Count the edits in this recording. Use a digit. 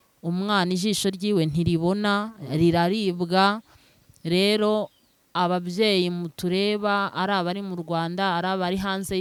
0